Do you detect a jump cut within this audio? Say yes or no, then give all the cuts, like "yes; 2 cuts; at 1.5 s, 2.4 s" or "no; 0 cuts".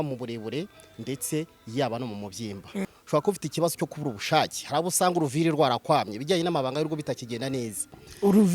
yes; 1 cut; at 2.9 s